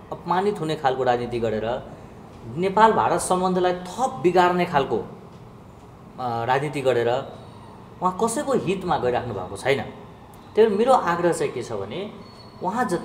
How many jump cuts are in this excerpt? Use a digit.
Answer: 0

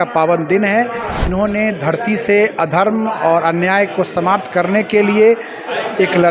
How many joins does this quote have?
1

